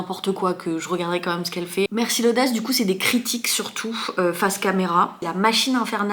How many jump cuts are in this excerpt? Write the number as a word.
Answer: two